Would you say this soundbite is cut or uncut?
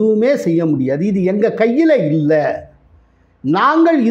uncut